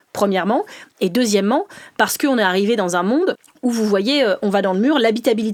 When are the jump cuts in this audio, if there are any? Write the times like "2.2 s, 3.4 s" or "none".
none